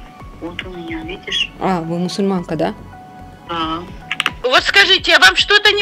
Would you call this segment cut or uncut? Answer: cut